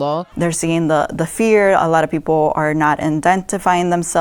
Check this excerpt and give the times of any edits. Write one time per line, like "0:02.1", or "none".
none